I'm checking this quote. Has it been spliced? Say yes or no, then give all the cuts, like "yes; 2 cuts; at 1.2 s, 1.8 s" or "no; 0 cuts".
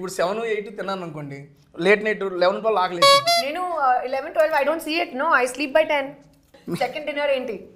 yes; 1 cut; at 6.6 s